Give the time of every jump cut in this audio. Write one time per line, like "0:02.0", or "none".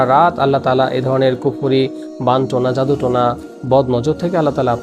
none